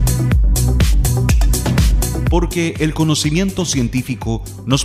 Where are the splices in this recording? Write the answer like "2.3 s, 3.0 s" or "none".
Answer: 2.3 s